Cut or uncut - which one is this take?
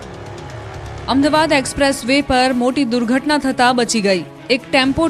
uncut